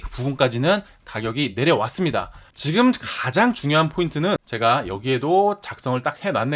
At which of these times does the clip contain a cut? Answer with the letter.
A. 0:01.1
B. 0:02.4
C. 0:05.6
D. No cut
B